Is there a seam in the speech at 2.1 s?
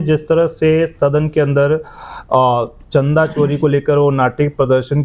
no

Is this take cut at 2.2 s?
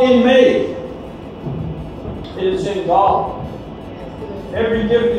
yes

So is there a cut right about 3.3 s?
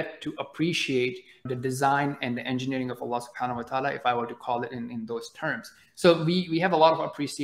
no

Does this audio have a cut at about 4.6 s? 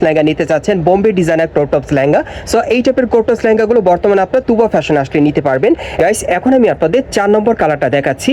no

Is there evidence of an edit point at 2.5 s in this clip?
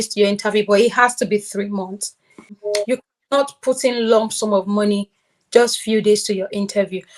yes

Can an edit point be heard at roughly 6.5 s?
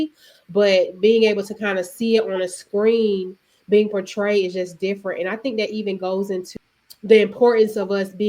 yes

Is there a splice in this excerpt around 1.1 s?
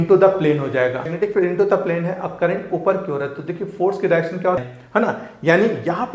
yes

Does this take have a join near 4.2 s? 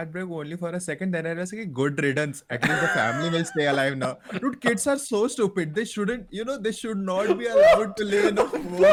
no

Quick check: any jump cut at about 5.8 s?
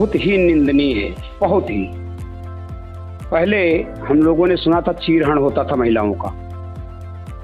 no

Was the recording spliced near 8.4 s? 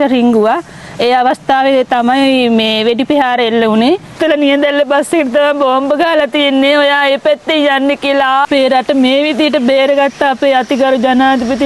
yes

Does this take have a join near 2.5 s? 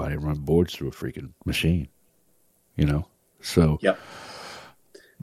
no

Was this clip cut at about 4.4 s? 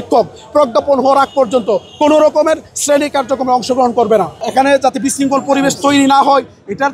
yes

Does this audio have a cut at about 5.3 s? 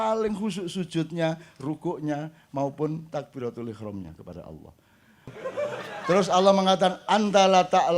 yes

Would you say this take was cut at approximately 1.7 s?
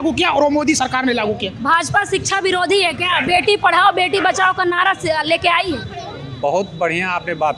no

